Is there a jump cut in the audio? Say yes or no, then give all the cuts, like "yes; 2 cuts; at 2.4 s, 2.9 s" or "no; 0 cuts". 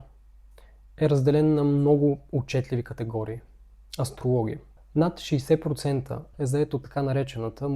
yes; 2 cuts; at 4.7 s, 6.3 s